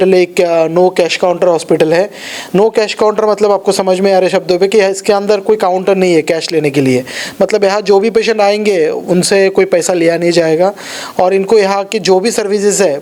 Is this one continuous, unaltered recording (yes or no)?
yes